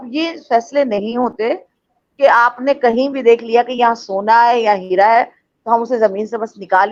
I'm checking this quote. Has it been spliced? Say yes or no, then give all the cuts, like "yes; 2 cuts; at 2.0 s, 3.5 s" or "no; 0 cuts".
no; 0 cuts